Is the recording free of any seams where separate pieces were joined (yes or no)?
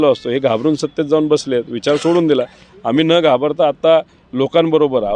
yes